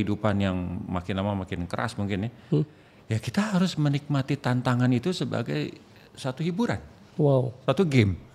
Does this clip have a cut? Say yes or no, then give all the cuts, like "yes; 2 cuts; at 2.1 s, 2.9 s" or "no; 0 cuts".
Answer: no; 0 cuts